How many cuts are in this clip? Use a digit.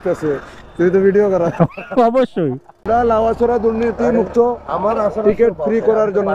1